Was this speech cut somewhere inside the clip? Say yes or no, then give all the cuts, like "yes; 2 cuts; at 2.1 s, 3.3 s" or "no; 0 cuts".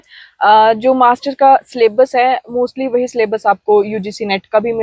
no; 0 cuts